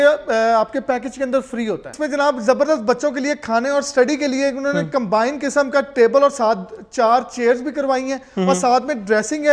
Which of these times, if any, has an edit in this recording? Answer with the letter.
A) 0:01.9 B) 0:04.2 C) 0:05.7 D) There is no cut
A